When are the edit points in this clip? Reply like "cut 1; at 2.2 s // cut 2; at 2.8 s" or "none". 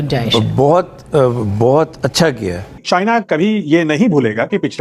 cut 1; at 2.8 s